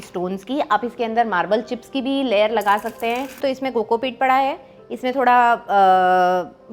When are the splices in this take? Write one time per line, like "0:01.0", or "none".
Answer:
0:03.4